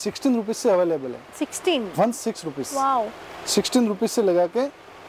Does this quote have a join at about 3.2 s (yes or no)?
no